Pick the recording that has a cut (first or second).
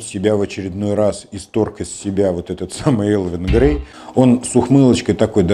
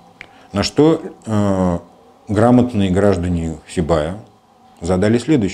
first